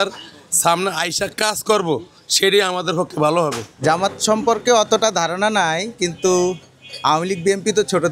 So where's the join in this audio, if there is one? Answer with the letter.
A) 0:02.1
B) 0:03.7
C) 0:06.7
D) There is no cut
B